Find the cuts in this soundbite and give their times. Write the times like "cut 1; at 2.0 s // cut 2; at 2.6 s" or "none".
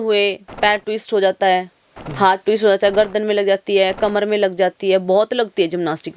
none